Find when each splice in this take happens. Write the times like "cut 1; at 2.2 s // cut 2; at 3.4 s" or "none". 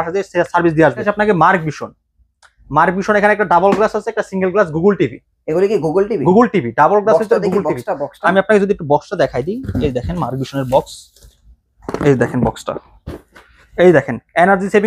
cut 1; at 1.0 s